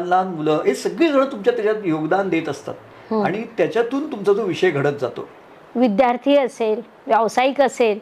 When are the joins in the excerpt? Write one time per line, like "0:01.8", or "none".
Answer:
0:05.4